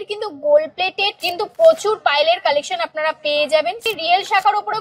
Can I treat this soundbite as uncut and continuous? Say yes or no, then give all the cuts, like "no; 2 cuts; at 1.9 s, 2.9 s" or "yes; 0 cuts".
no; 2 cuts; at 1.2 s, 3.9 s